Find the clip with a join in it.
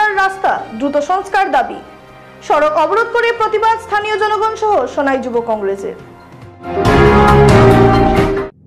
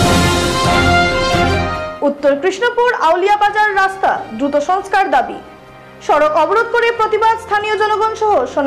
second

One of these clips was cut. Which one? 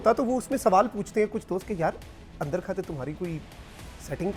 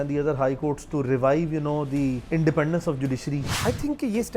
second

